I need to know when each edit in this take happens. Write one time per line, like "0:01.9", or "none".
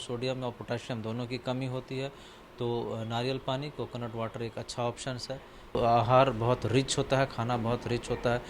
0:05.8